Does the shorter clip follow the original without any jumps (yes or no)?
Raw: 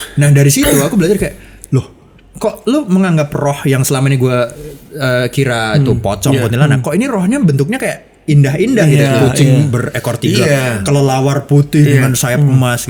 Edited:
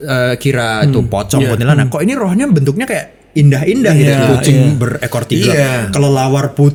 yes